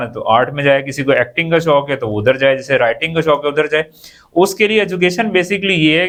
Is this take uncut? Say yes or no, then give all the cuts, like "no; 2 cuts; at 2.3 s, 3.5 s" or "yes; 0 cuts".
yes; 0 cuts